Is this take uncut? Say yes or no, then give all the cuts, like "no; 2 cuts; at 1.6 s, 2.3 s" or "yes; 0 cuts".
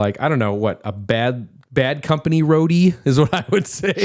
yes; 0 cuts